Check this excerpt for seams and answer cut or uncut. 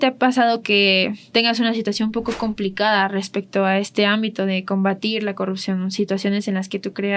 uncut